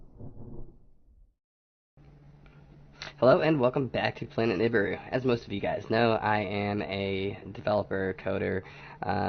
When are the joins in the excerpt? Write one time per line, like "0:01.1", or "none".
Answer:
0:01.4